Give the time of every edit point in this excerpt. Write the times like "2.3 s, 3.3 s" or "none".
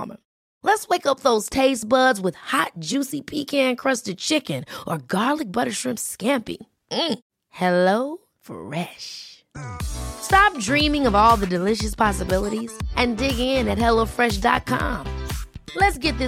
none